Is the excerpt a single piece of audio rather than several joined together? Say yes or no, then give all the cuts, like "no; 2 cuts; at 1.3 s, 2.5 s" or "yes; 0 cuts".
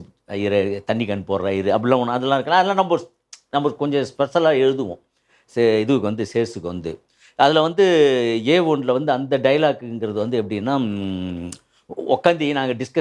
yes; 0 cuts